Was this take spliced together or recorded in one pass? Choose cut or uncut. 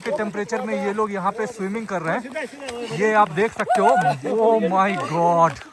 uncut